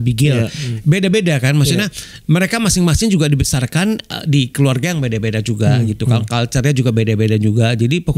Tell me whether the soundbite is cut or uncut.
uncut